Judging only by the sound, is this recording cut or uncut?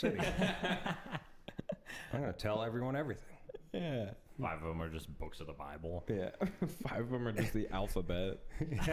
uncut